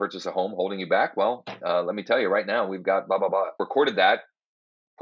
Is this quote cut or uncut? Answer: cut